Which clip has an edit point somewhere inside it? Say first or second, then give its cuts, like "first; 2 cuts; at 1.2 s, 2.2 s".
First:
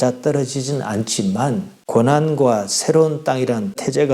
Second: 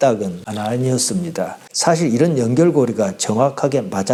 first; 1 cut; at 1.7 s